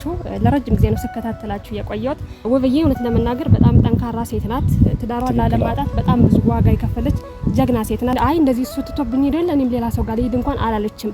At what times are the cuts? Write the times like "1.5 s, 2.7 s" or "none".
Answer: 2.4 s, 8.2 s